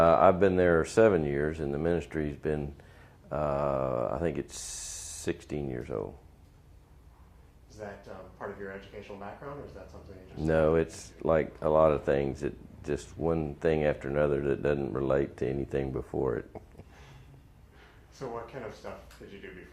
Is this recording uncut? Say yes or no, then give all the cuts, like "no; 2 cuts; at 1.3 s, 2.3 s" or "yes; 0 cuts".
no; 1 cut; at 15.3 s